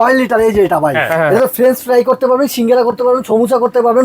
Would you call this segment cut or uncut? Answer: cut